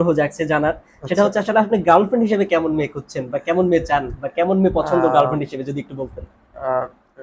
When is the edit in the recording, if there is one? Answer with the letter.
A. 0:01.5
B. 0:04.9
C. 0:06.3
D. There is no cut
D